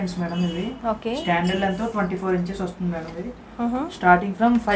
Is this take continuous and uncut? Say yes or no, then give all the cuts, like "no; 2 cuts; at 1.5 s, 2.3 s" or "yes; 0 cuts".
yes; 0 cuts